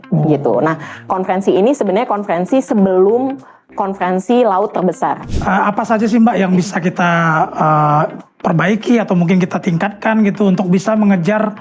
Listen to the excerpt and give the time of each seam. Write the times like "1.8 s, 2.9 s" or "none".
5.3 s

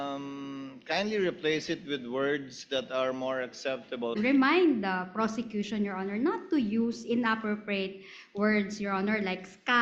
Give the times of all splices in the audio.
4.2 s

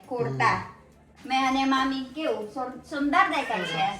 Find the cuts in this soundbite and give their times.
1.1 s

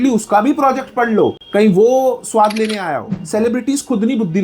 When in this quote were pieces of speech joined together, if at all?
3.1 s

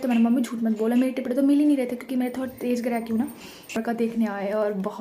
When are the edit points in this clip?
3.8 s

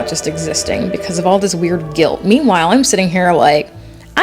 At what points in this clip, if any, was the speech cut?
none

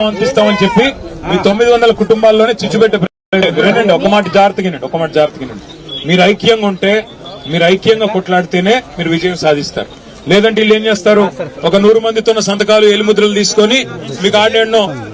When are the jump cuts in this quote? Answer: 3.2 s

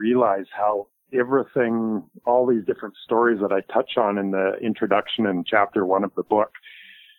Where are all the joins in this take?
none

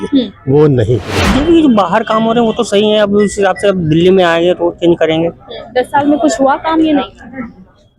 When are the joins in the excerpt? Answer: 1.2 s

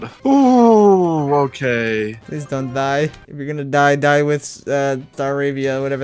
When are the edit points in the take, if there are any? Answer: none

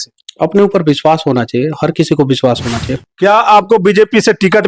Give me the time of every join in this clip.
3.0 s

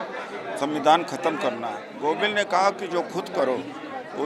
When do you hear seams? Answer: 1.8 s

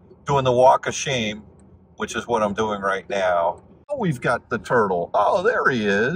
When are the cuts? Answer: 4.0 s

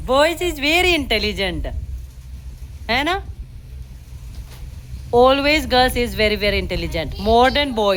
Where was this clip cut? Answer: none

